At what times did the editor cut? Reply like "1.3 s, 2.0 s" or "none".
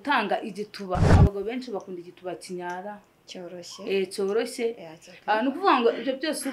1.1 s